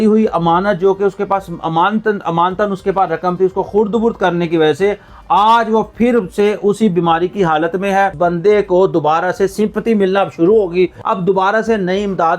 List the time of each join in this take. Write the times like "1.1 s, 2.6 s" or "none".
8.1 s, 11.0 s